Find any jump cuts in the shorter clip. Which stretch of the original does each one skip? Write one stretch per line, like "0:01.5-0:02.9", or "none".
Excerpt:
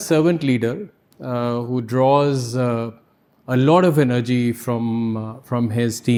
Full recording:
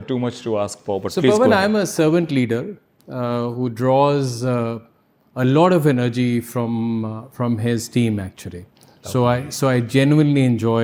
none